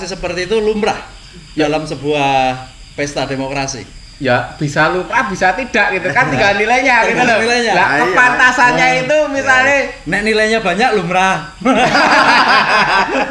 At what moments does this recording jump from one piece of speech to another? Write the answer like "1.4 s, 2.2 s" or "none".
none